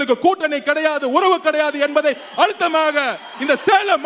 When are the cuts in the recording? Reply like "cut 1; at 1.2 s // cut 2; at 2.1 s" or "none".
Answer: none